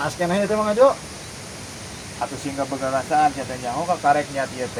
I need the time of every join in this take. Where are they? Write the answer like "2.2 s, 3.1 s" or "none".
none